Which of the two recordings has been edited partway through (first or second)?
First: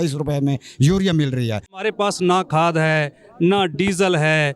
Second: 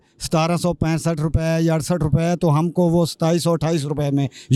first